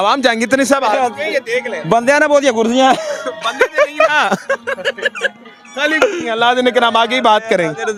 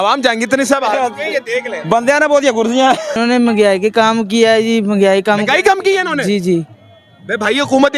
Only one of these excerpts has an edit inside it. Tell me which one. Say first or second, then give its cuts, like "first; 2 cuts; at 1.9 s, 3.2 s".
second; 1 cut; at 3.2 s